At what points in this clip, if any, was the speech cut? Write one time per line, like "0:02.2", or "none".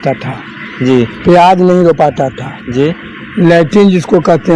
none